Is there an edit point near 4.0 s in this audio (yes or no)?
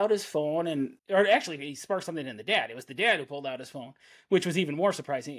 no